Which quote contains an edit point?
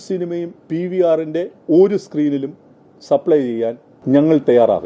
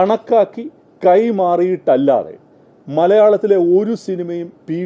first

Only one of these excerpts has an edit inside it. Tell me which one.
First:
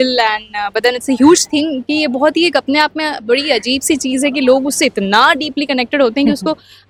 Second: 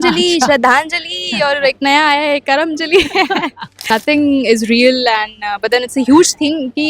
second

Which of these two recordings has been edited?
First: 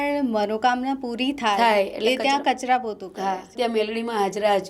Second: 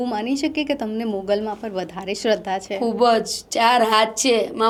first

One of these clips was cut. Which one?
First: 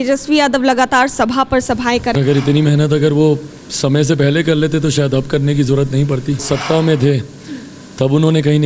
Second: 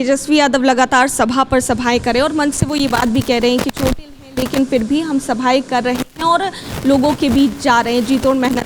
first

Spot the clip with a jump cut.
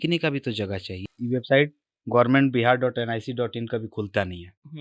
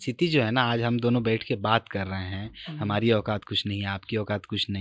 first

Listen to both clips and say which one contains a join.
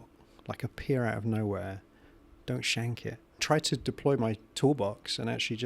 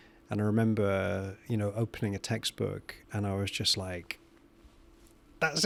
first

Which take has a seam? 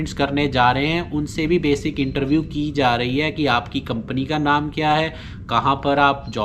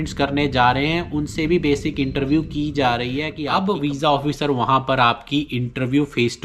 second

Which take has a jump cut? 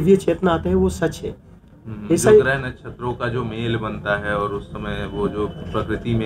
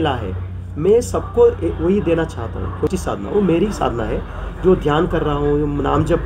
second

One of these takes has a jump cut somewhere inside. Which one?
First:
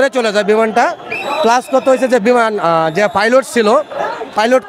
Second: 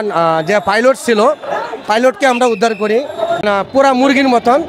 second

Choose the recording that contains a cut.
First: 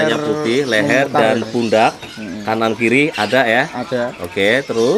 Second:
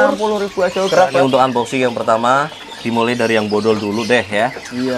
second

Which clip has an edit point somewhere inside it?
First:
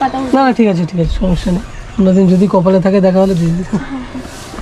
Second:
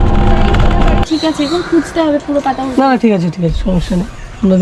second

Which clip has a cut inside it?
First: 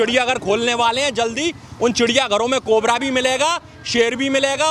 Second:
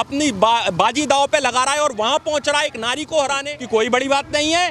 second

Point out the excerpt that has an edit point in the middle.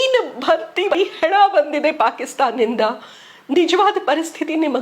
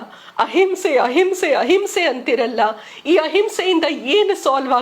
first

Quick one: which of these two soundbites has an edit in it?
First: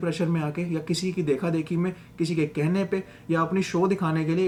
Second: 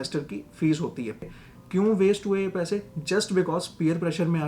second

